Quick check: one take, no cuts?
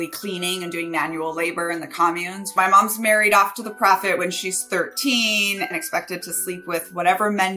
no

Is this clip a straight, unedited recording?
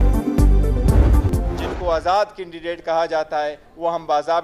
no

